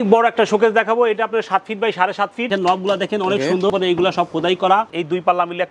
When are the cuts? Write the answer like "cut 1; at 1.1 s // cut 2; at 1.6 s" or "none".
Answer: cut 1; at 2.5 s // cut 2; at 3.7 s // cut 3; at 4.9 s